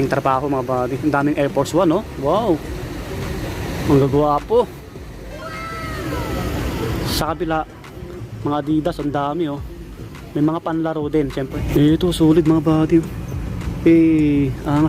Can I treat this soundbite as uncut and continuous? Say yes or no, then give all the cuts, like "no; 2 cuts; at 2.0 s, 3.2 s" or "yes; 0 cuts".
no; 1 cut; at 11.6 s